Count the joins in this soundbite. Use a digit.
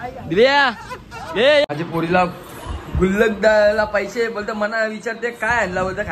1